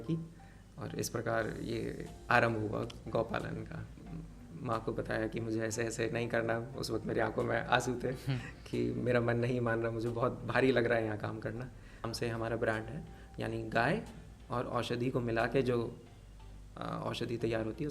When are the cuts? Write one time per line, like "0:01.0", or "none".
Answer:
0:04.0
0:12.1